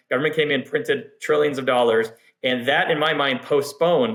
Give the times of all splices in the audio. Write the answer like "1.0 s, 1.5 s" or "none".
none